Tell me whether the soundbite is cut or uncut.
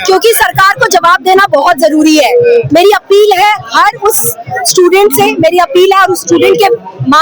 uncut